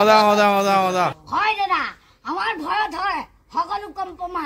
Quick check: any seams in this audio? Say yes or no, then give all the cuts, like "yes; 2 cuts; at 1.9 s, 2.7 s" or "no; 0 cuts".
yes; 1 cut; at 1.2 s